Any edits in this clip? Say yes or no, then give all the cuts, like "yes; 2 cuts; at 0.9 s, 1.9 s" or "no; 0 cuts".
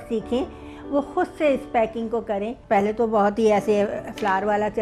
no; 0 cuts